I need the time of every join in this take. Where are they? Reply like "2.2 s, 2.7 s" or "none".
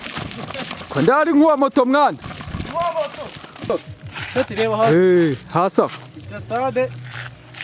3.7 s